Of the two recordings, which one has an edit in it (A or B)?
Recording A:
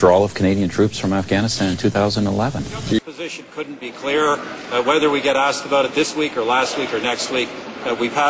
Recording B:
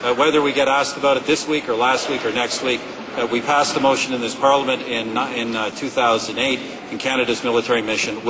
A